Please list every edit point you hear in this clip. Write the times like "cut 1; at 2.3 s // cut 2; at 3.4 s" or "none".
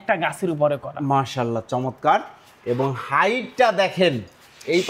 none